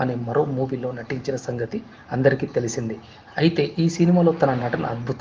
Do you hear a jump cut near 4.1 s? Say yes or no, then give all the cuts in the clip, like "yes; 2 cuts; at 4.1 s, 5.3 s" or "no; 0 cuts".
no; 1 cut; at 2.6 s